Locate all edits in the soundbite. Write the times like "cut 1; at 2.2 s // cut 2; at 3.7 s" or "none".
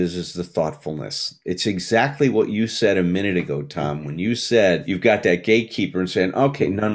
none